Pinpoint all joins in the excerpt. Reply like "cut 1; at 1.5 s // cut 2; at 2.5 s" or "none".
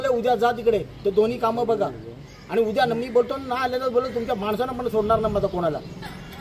none